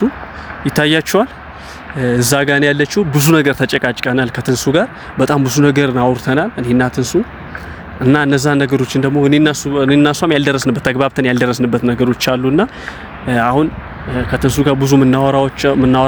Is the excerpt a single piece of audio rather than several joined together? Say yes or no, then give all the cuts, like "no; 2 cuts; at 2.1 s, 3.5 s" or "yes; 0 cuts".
yes; 0 cuts